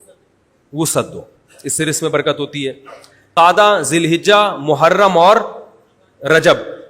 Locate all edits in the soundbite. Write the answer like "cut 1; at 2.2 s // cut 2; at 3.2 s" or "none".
cut 1; at 3.3 s